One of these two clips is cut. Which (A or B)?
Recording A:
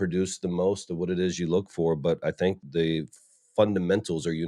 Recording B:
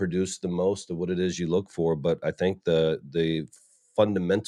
A